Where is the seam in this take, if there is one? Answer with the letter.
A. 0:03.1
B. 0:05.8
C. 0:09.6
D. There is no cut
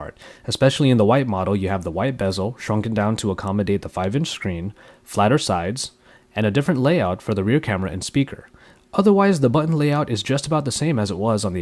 B